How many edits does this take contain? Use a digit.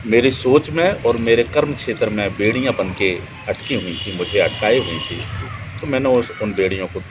0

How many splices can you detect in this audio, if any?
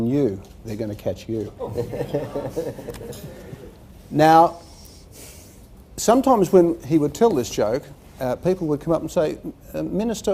0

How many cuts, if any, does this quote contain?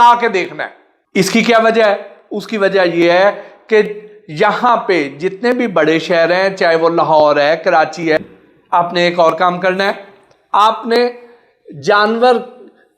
1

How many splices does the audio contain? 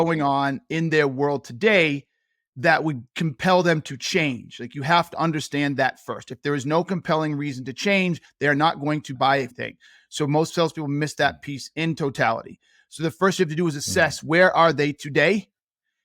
1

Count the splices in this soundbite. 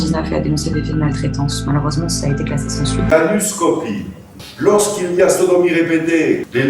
1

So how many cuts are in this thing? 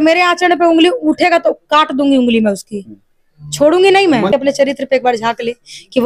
1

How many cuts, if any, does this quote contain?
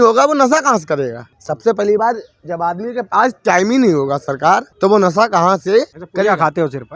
3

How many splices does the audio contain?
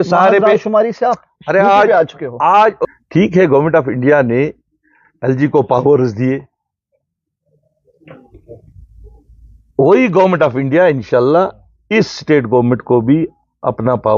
1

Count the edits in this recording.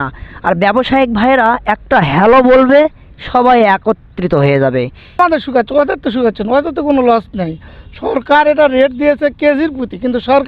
1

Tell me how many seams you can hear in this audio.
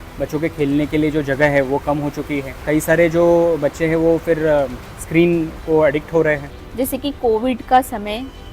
2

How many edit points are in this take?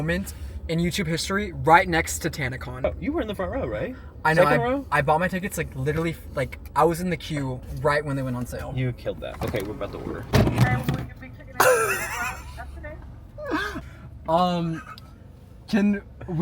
0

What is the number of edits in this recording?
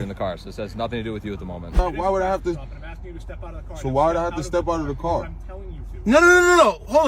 1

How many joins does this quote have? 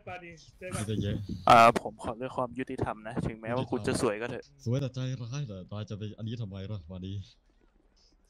1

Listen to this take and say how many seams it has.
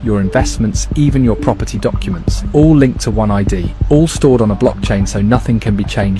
1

